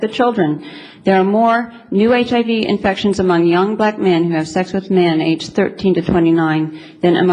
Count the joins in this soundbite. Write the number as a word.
zero